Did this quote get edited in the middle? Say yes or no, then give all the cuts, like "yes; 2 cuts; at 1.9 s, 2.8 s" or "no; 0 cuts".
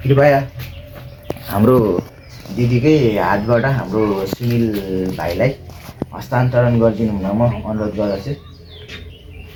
no; 0 cuts